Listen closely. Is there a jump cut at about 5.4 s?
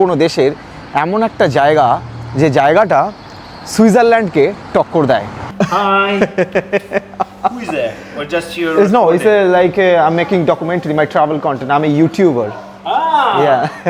yes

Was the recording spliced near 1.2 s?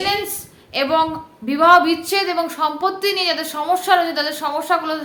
no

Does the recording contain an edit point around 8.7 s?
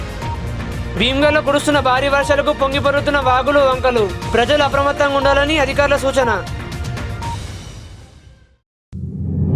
yes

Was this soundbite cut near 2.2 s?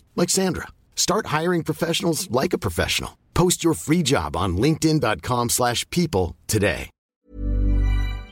no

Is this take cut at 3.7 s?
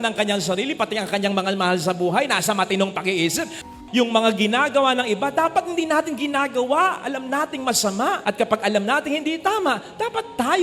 yes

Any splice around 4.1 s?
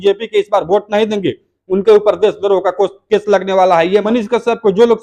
yes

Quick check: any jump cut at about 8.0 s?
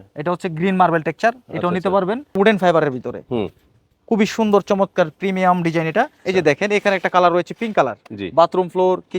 no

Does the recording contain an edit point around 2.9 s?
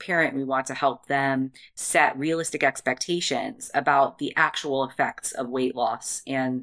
no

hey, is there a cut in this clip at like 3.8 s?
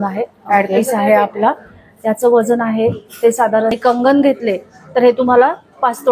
yes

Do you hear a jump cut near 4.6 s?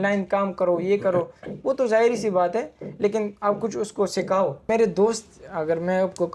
yes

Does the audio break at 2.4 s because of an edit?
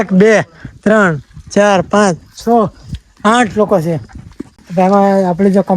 no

